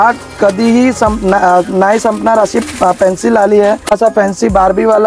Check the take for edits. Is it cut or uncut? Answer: cut